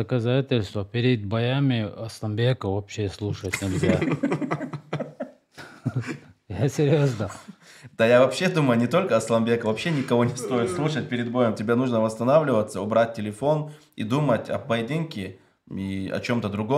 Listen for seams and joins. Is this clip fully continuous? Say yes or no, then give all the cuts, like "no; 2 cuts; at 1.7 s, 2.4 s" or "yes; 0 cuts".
yes; 0 cuts